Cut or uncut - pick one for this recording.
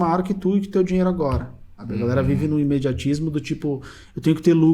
cut